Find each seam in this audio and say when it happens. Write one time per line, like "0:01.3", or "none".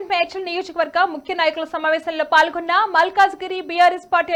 none